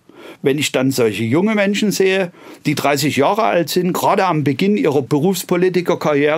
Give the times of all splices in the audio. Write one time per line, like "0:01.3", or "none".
0:05.1